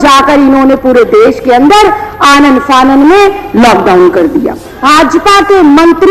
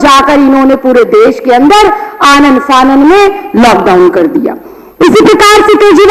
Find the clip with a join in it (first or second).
first